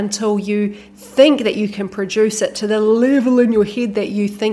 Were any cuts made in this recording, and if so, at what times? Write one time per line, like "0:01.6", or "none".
none